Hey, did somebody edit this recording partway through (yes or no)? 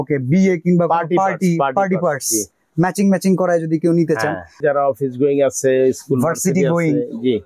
yes